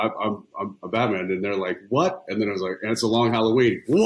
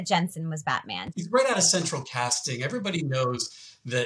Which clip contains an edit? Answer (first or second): second